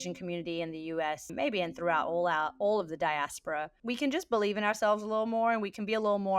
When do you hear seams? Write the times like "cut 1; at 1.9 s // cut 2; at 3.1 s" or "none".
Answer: cut 1; at 1.3 s // cut 2; at 3.7 s